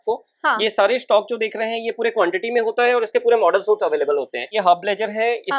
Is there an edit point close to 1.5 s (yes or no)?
no